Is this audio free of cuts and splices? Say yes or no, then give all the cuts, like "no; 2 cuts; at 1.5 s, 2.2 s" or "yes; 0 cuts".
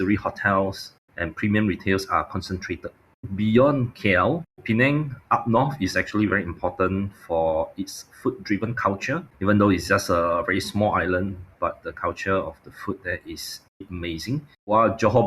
no; 3 cuts; at 3.3 s, 4.6 s, 14.2 s